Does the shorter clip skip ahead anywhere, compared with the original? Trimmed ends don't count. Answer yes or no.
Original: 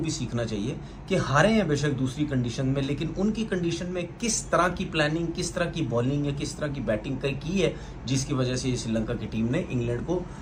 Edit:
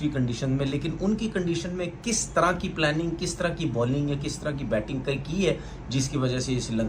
no